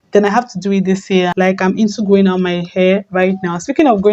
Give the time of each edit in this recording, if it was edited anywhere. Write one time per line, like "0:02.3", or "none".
0:01.3